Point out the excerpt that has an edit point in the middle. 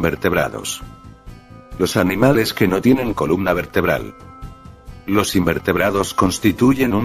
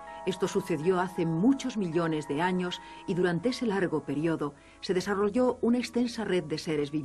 second; 1 cut; at 6.1 s

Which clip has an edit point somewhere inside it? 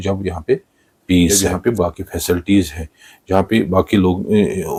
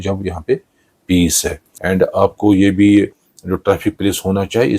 second; 1 cut; at 2.0 s

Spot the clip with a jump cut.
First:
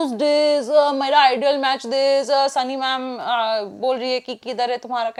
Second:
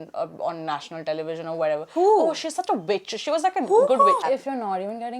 second; 1 cut; at 4.2 s

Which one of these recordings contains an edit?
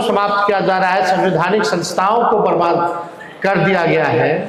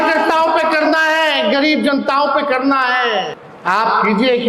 second; 1 cut; at 3.4 s

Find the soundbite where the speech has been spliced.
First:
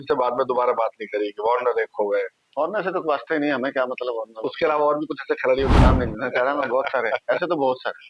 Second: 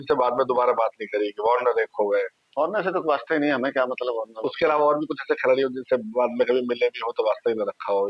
first; 1 cut; at 5.8 s

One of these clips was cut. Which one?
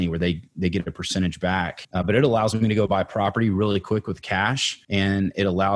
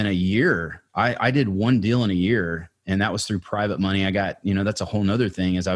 first; 2 cuts; at 1.8 s, 4.7 s

